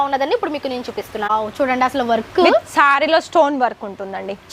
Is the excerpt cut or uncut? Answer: cut